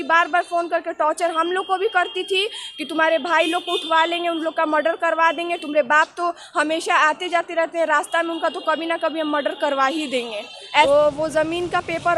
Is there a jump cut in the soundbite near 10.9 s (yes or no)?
yes